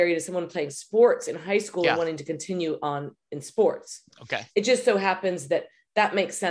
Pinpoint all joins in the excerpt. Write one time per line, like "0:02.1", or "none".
none